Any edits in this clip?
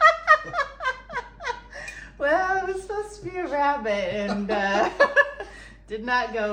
no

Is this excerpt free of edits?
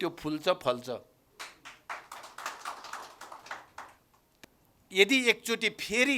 no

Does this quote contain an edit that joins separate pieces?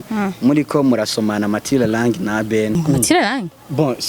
yes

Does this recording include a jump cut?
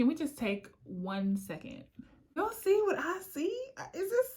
yes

